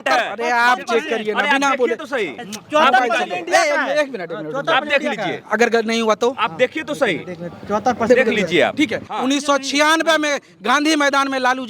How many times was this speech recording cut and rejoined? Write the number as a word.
one